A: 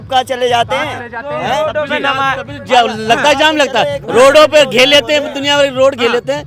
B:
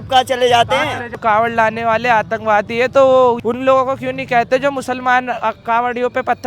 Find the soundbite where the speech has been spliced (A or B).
B